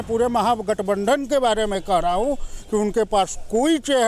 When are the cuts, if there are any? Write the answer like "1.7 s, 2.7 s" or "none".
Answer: none